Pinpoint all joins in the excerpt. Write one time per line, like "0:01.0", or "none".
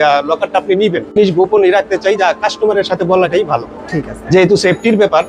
0:01.2